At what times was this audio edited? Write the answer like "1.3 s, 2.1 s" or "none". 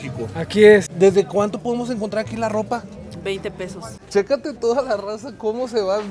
0.9 s, 4.0 s